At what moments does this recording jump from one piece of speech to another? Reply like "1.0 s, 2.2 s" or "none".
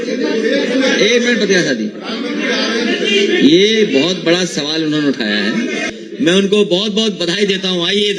5.9 s

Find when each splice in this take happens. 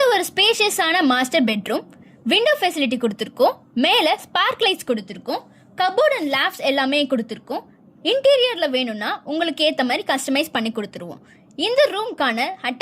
none

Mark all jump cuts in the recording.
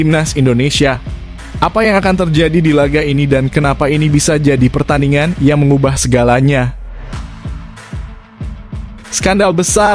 7.1 s, 9.2 s

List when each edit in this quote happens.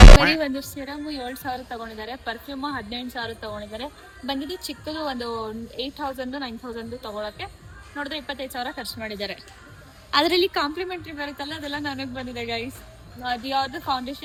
none

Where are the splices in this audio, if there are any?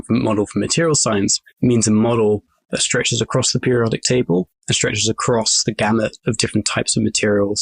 1.4 s, 4.6 s

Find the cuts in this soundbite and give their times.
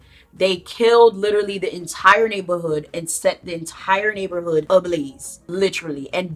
none

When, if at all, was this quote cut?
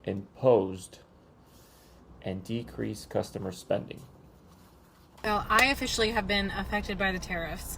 5.0 s

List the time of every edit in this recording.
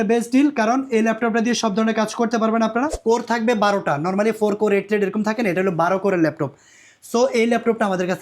2.9 s

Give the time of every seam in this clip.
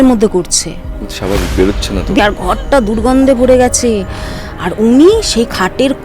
2.2 s

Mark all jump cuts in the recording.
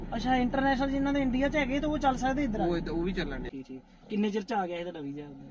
3.5 s

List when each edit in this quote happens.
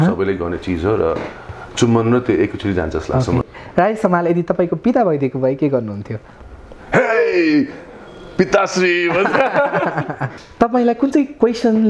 3.5 s, 10.3 s

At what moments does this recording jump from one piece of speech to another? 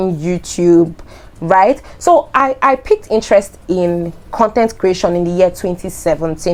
none

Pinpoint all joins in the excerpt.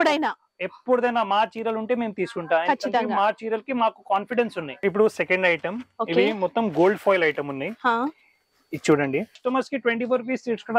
4.8 s, 9.4 s

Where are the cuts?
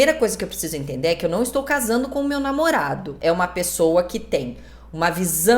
3.1 s

